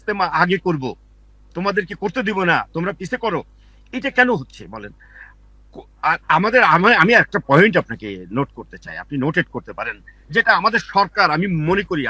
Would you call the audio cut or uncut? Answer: uncut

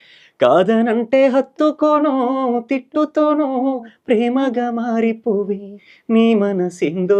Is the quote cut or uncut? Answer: uncut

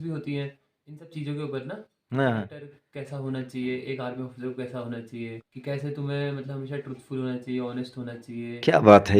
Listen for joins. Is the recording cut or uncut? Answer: cut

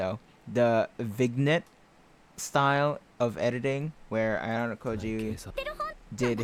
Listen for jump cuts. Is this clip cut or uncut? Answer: uncut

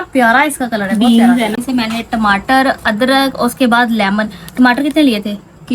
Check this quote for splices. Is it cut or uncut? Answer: cut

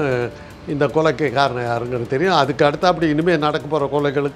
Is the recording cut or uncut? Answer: uncut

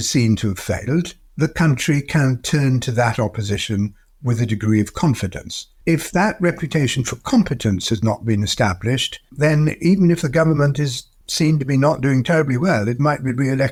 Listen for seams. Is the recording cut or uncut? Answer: uncut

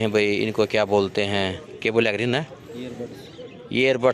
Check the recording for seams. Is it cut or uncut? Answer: uncut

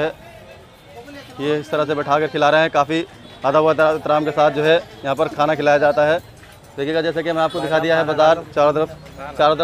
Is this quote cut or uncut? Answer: uncut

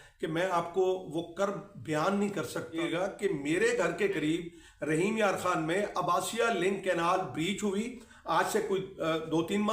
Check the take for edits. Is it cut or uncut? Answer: cut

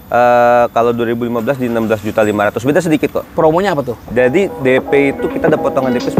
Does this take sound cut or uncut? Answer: cut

